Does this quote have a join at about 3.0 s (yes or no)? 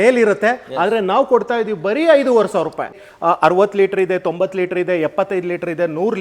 yes